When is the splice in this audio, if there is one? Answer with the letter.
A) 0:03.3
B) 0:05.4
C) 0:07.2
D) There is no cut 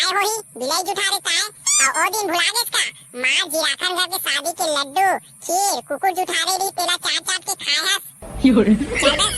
D